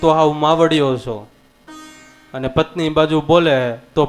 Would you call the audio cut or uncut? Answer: uncut